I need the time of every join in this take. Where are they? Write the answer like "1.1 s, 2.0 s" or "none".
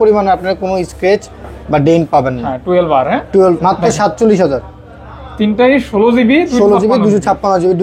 3.6 s